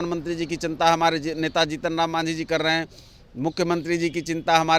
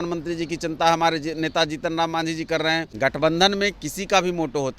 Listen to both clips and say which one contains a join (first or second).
second